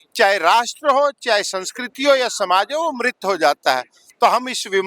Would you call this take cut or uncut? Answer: uncut